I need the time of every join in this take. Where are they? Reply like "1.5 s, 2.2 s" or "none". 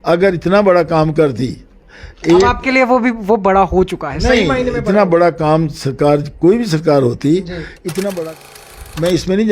8.4 s